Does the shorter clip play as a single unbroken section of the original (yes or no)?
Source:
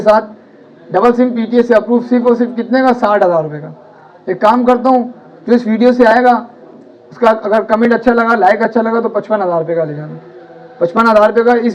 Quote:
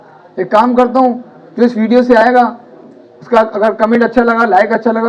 yes